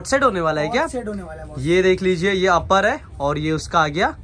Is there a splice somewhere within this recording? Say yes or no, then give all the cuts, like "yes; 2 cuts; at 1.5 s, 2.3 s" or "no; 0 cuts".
no; 0 cuts